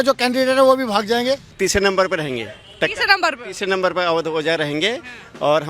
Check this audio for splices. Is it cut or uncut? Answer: cut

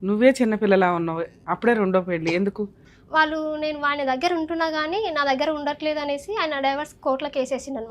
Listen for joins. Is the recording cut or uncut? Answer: cut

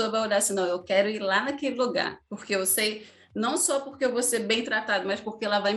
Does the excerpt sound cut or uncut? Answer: uncut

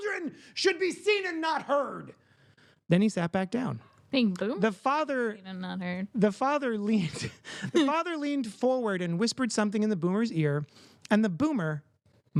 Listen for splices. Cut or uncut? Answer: uncut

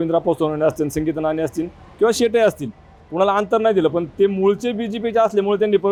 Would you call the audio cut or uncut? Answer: uncut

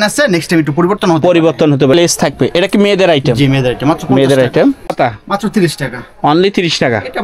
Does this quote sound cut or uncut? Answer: cut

